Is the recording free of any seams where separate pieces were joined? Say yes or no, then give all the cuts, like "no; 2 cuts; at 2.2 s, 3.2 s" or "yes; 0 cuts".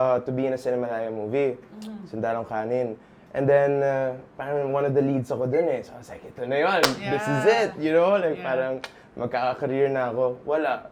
yes; 0 cuts